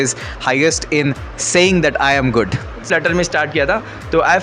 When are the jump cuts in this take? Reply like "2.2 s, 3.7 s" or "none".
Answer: 2.9 s